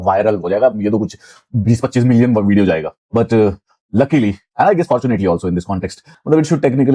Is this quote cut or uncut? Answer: uncut